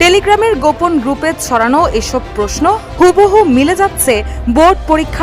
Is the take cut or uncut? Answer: cut